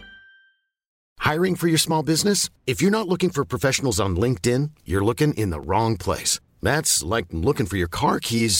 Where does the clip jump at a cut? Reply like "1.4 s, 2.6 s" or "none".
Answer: none